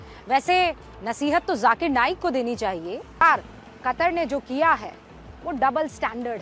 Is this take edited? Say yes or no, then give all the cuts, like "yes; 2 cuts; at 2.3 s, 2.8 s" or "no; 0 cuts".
yes; 1 cut; at 3.2 s